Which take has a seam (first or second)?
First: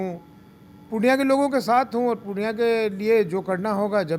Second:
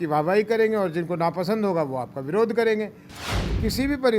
second